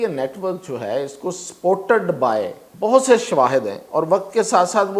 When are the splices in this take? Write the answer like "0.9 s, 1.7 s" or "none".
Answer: 2.6 s